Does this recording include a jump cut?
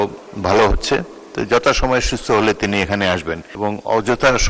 yes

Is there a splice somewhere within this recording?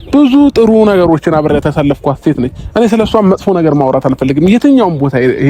no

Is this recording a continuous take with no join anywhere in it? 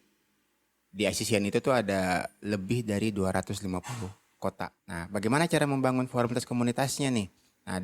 no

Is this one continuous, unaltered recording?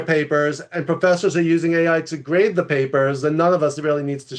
yes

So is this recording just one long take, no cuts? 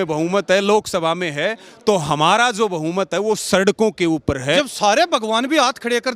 no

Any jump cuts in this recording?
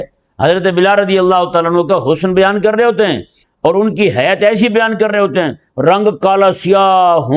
no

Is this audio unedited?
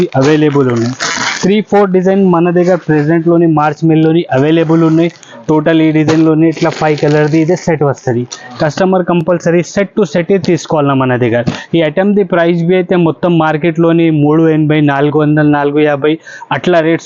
yes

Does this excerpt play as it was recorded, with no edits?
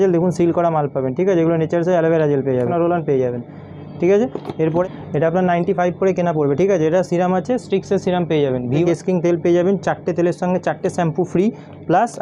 no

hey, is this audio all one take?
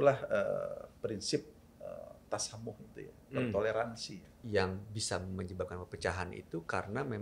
no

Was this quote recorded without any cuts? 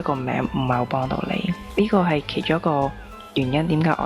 no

